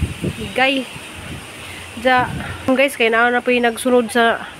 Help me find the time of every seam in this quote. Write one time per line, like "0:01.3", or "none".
0:02.7

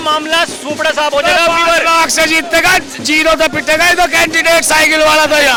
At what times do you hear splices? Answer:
none

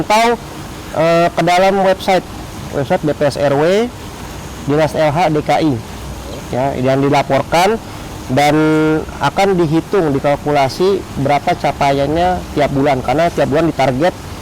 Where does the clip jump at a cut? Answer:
none

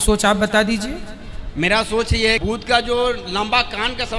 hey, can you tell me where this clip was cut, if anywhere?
none

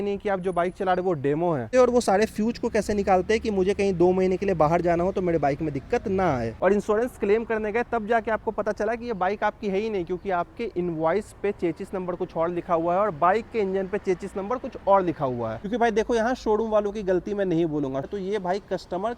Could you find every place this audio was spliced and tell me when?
0:01.7
0:06.5
0:15.6
0:18.1

